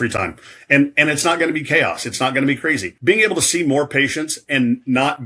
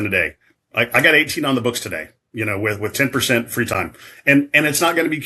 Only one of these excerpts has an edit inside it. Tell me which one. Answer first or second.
first